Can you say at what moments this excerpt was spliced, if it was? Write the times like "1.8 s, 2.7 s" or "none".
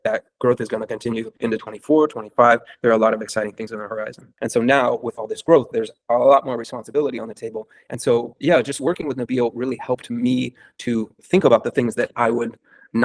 4.3 s

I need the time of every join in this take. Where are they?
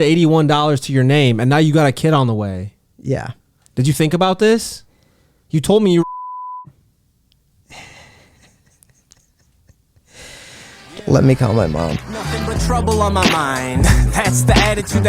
12.6 s

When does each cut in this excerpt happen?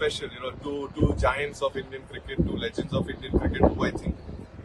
none

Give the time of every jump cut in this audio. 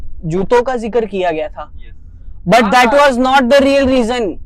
none

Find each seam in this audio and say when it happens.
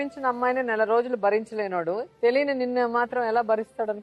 2.1 s

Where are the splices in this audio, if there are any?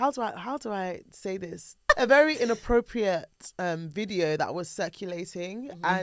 1.9 s

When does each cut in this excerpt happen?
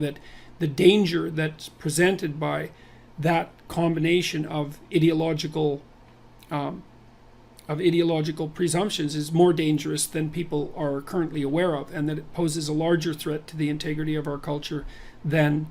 4.7 s

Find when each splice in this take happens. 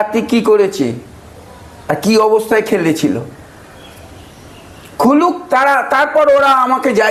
none

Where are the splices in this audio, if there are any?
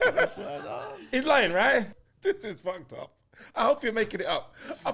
1.9 s

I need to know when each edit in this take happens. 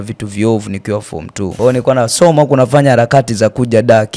1.5 s

